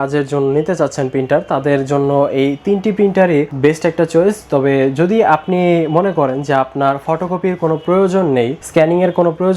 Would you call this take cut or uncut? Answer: cut